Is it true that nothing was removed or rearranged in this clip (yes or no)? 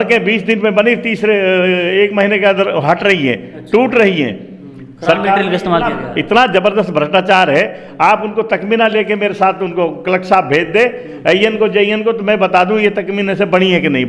yes